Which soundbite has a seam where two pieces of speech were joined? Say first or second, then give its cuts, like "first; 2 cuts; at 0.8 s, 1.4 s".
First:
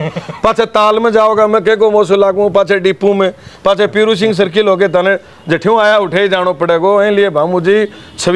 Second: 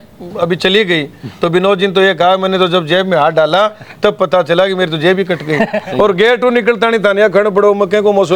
second; 1 cut; at 5.8 s